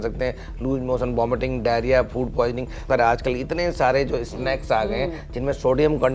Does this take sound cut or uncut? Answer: cut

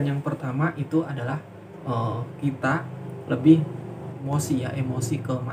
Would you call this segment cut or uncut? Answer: cut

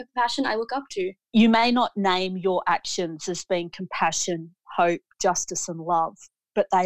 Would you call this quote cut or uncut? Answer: cut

